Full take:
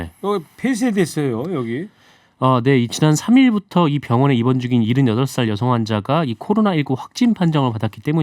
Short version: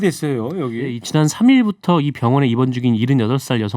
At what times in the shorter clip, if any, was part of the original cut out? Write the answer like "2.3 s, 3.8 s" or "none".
1.0 s